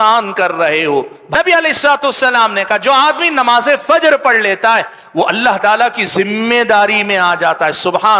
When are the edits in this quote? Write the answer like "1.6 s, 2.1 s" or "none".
1.2 s